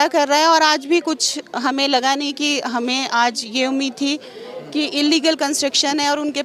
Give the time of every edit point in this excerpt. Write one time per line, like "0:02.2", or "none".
none